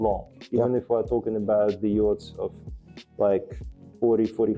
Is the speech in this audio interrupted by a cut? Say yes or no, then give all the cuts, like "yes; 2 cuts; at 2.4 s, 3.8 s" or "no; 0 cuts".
no; 0 cuts